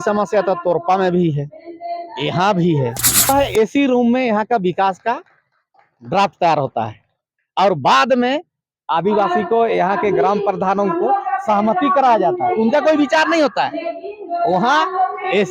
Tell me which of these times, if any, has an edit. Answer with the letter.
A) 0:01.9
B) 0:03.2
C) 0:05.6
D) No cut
B